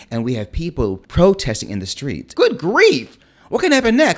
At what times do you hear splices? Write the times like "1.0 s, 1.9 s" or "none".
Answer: 2.2 s